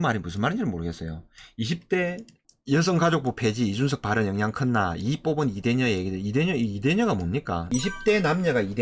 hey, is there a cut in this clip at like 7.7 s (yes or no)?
yes